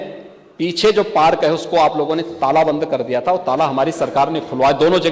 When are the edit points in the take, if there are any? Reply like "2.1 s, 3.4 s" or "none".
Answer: none